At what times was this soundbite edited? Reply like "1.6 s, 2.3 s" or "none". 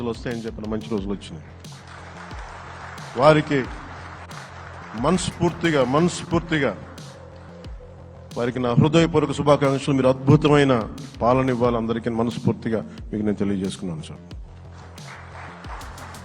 6.9 s, 8.3 s